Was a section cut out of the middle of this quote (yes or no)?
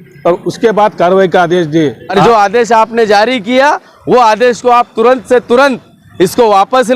yes